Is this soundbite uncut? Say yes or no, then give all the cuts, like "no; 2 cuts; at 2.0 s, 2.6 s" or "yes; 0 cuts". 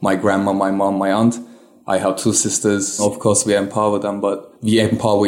no; 1 cut; at 3.0 s